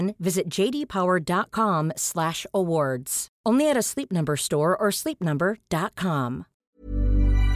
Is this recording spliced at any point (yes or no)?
yes